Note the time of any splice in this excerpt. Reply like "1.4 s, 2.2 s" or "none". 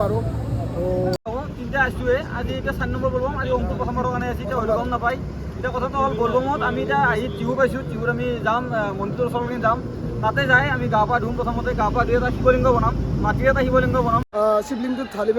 1.2 s, 14.3 s